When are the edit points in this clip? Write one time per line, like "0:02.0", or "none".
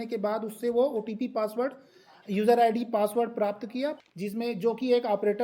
0:04.0